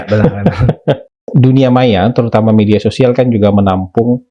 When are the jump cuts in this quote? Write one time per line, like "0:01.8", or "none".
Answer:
0:01.3